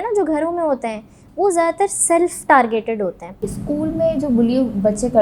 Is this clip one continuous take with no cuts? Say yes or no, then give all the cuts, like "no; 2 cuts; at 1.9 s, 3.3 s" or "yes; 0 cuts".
no; 1 cut; at 3.4 s